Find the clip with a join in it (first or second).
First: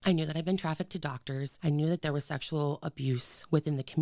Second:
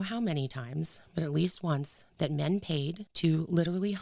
second